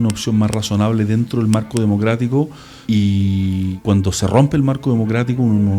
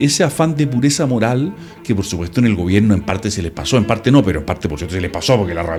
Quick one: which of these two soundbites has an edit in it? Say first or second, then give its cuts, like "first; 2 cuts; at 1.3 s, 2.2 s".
first; 2 cuts; at 2.7 s, 3.8 s